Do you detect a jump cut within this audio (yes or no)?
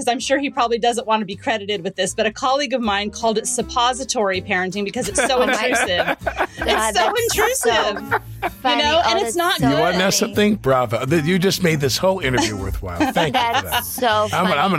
no